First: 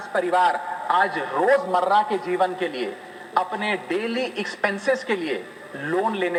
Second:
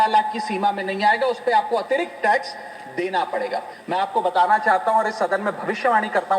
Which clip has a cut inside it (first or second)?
second